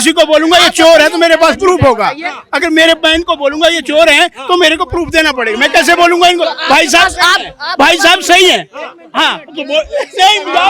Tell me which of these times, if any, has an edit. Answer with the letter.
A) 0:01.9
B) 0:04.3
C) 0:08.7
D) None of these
D